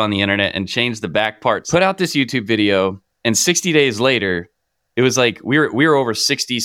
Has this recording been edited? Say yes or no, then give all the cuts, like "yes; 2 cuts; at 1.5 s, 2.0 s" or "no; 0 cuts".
yes; 1 cut; at 1.6 s